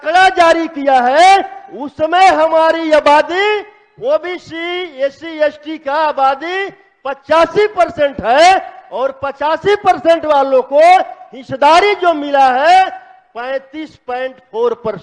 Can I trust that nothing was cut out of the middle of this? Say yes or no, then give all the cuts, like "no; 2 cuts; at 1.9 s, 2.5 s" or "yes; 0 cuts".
yes; 0 cuts